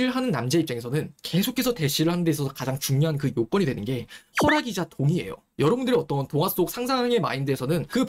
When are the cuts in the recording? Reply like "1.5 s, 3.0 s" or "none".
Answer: 5.4 s